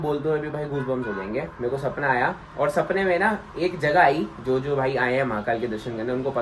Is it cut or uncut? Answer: uncut